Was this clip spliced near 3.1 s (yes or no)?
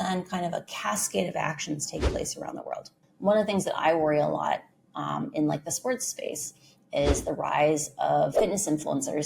yes